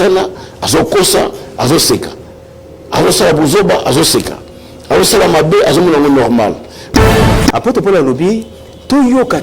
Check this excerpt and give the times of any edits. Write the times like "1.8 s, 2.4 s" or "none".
7.0 s